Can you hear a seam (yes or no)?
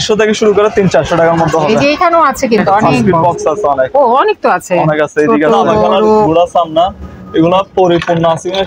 yes